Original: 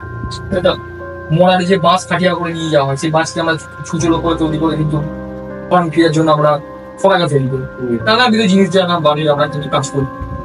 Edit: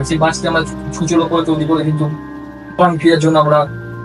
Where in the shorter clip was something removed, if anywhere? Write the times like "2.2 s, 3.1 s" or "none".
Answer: none